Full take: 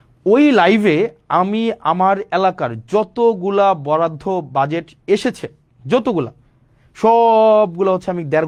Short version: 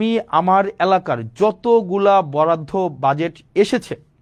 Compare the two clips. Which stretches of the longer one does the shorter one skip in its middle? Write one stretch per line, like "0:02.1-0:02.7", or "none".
none